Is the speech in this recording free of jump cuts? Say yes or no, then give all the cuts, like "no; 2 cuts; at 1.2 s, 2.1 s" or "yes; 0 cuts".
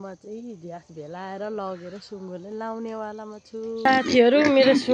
yes; 0 cuts